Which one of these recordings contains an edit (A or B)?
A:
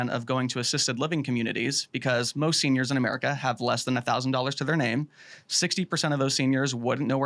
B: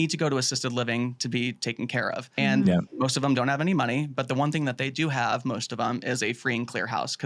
B